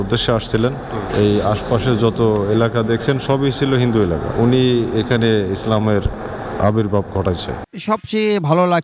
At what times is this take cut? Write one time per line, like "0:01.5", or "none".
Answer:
0:01.0
0:04.3
0:07.6